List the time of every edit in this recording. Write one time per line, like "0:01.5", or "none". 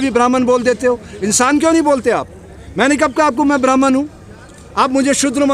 none